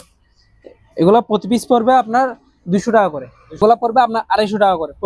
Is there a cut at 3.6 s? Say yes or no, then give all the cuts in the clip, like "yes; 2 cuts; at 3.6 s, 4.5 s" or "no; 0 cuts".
yes; 1 cut; at 3.6 s